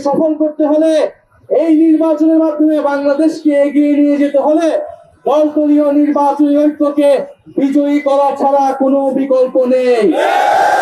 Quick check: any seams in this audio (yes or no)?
no